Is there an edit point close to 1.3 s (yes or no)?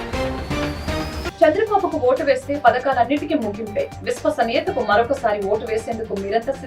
yes